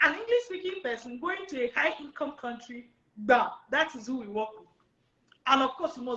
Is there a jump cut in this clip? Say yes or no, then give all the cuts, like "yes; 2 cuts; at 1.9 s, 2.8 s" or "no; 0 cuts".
no; 0 cuts